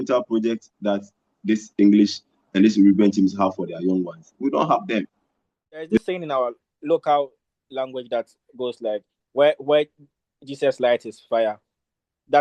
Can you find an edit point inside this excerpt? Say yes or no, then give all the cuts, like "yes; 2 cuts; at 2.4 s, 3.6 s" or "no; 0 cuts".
yes; 1 cut; at 5.9 s